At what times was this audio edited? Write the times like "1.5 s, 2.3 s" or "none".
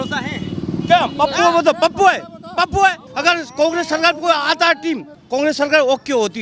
3.1 s, 5.1 s